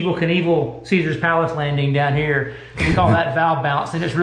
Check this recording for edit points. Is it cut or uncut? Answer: uncut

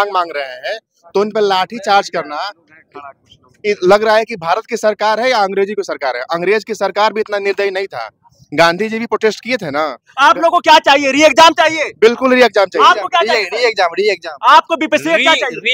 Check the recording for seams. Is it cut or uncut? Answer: uncut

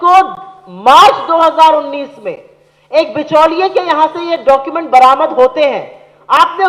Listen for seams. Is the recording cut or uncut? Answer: uncut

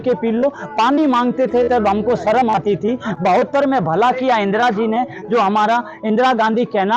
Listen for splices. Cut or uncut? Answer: uncut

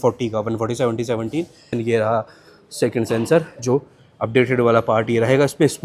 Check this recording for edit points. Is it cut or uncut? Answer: cut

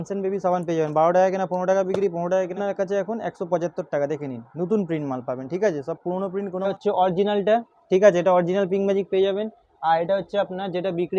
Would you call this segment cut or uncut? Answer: cut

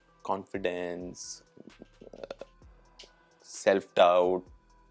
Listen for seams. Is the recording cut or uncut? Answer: uncut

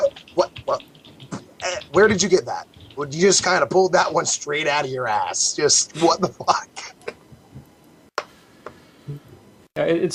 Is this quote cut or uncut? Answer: uncut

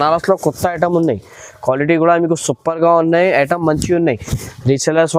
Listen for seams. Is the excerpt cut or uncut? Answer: uncut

